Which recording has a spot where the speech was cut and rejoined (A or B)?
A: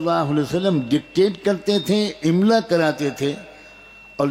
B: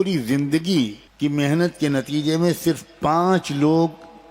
B